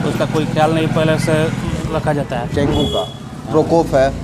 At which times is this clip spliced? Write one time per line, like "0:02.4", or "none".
0:02.5

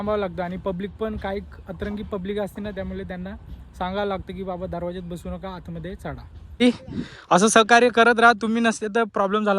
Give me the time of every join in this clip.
0:06.6

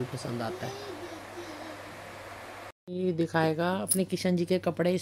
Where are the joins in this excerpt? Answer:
0:02.9

